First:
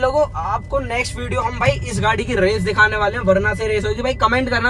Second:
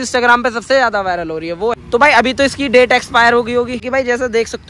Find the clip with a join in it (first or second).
second